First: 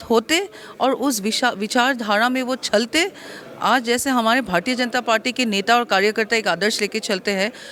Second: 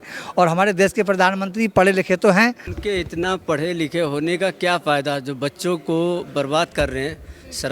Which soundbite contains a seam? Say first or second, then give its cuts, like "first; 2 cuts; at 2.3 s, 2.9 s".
second; 1 cut; at 2.7 s